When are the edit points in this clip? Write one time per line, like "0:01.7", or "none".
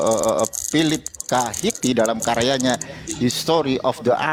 none

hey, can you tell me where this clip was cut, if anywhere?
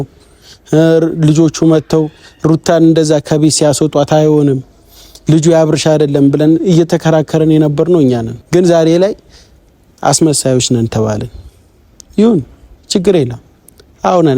0:08.3

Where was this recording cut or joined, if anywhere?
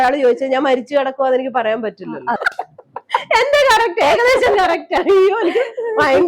0:02.4

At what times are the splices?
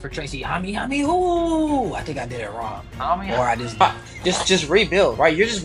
0:03.8

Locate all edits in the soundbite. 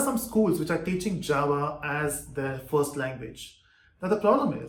none

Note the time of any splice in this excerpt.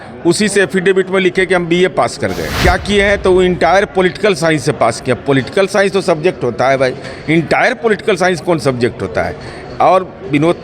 0:02.5

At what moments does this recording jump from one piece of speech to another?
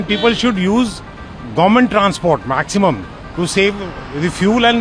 none

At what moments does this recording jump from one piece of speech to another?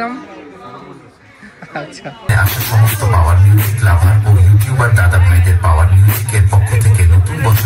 0:02.3

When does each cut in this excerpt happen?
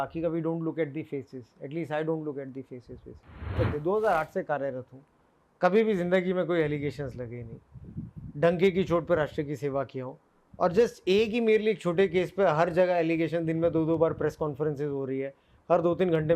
0:03.5

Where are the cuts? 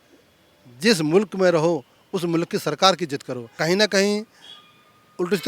0:03.5

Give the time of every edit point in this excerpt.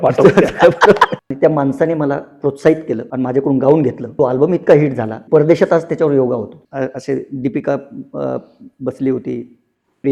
0:01.1
0:03.1
0:04.0
0:05.1
0:06.6

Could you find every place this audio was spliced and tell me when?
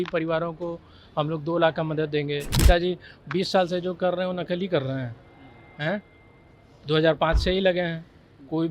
0:02.5

